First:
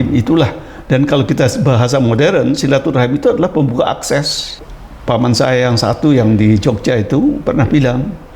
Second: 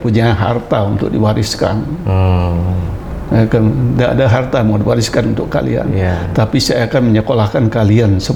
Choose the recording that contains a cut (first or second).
first